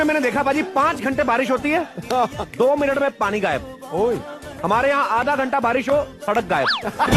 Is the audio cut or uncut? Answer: uncut